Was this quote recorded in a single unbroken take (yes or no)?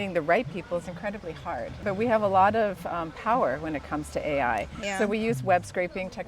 no